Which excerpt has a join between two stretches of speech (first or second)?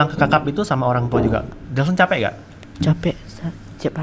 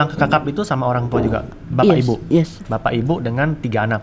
first